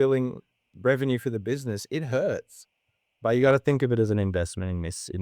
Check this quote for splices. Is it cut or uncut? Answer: uncut